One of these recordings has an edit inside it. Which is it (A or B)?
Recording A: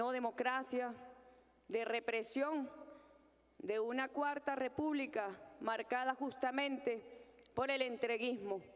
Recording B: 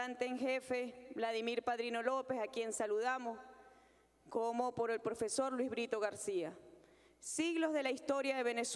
B